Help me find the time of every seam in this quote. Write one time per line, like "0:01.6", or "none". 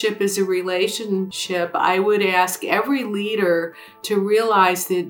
0:01.4

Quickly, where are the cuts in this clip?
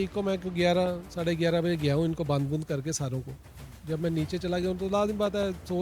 none

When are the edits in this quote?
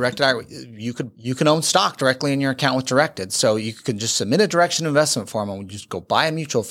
0:01.1

